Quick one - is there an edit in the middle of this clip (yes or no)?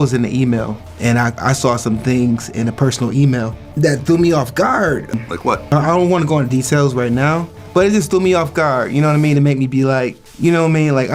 no